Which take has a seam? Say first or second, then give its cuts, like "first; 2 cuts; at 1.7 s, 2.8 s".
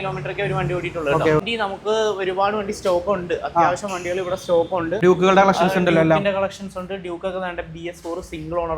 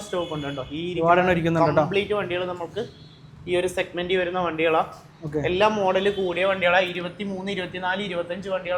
first; 2 cuts; at 1.5 s, 5.0 s